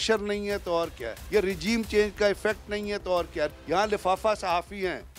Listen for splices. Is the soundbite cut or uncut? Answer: cut